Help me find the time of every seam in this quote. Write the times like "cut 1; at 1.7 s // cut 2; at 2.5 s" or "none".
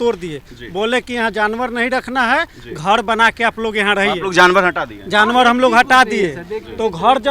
none